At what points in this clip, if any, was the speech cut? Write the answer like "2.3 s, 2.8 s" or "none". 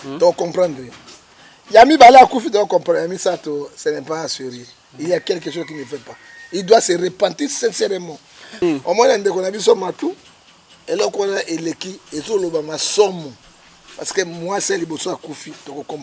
8.6 s